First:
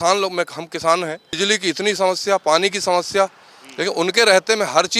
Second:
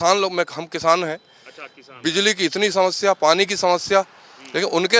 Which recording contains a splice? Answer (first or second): first